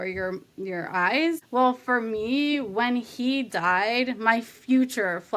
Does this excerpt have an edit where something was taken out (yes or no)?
yes